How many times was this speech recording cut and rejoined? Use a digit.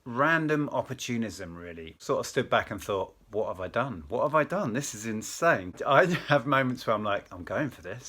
2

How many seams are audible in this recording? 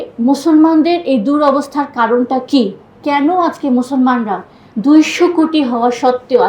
1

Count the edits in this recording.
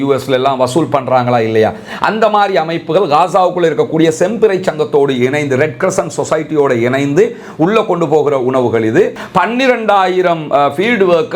1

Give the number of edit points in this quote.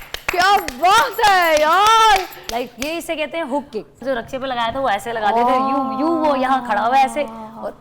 1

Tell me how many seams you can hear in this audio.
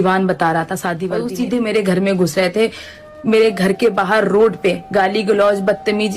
1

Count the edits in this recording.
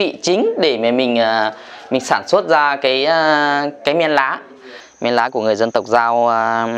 1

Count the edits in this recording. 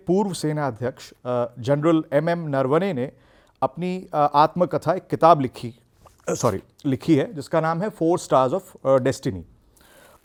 0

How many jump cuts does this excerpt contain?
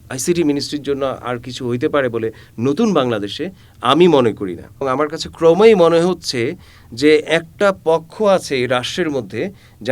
1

